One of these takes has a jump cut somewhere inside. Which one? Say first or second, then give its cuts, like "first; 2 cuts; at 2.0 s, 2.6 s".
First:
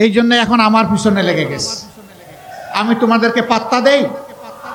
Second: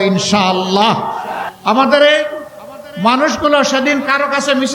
second; 1 cut; at 1.4 s